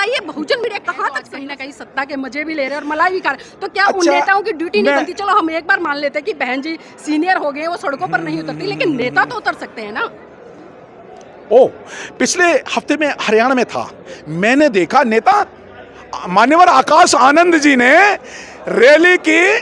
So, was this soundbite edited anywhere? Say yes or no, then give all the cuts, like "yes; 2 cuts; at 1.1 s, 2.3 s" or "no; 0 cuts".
yes; 1 cut; at 1.3 s